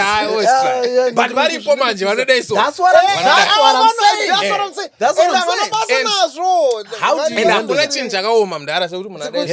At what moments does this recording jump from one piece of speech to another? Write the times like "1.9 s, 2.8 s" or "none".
none